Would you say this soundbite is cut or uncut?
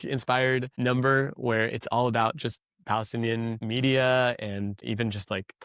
cut